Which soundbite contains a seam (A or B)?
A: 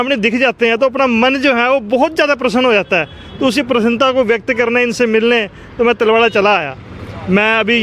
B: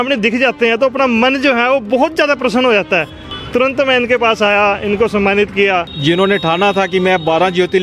B